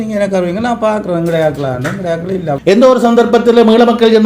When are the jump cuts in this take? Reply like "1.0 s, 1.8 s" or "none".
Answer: 2.5 s